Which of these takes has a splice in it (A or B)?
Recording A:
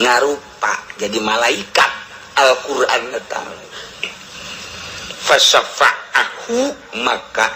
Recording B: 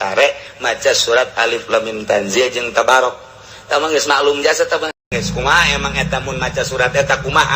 B